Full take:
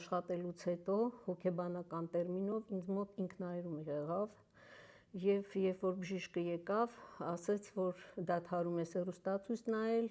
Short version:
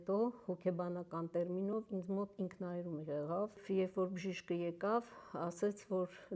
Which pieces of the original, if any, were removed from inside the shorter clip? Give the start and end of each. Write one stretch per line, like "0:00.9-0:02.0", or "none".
0:04.4-0:05.5